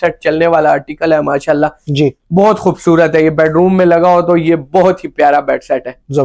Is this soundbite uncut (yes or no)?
yes